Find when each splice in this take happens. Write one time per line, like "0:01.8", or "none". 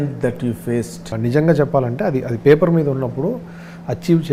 0:01.1